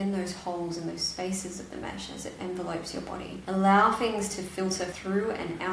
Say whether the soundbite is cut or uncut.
uncut